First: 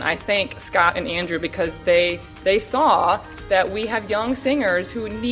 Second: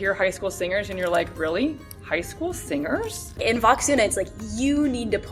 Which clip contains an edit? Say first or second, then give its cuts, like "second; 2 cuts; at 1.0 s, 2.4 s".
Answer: second; 1 cut; at 3.3 s